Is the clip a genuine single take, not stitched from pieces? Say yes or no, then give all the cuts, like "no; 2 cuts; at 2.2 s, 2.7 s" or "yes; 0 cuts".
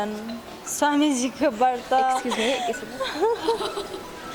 yes; 0 cuts